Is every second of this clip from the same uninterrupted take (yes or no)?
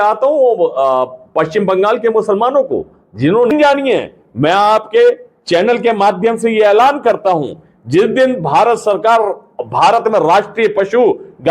no